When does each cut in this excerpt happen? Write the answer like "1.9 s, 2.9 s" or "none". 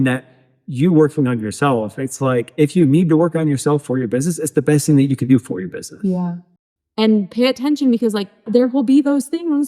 6.7 s, 8.4 s